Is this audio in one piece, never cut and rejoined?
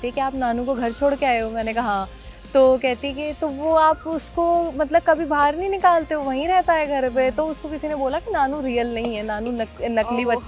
yes; 0 cuts

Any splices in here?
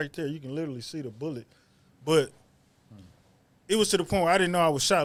no; 0 cuts

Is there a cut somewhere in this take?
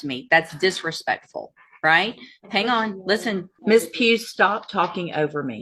yes; 1 cut; at 3.5 s

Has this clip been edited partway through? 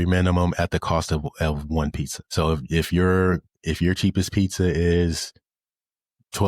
yes; 1 cut; at 2.1 s

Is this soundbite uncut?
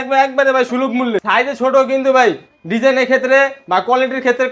no; 1 cut; at 1.2 s

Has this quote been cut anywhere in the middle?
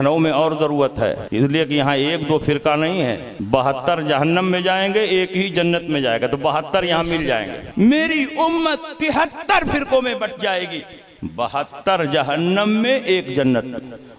yes; 3 cuts; at 1.2 s, 3.3 s, 7.6 s

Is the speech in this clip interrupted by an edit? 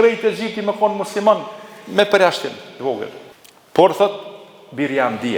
no; 0 cuts

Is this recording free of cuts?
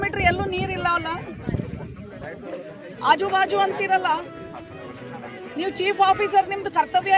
yes; 0 cuts

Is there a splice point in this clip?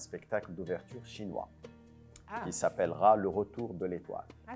no; 0 cuts

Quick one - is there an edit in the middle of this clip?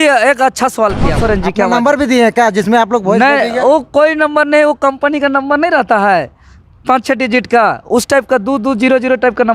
yes; 1 cut; at 1.2 s

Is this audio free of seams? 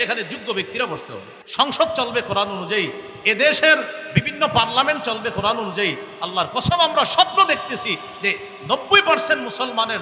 no; 1 cut; at 1.4 s

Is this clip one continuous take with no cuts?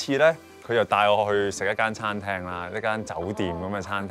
yes; 0 cuts

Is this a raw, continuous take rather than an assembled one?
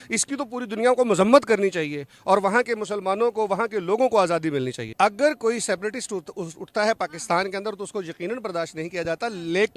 yes; 0 cuts

